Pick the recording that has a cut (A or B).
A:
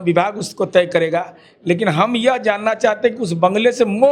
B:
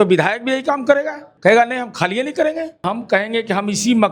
B